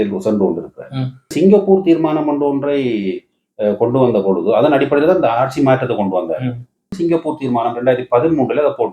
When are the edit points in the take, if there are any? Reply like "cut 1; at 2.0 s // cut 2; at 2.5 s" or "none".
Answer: cut 1; at 1.3 s // cut 2; at 6.9 s